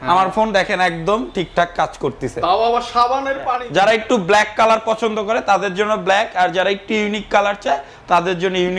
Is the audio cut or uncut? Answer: cut